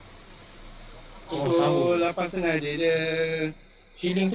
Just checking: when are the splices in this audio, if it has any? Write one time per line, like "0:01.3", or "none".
none